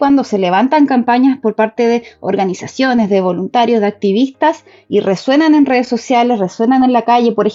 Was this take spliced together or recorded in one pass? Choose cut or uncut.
uncut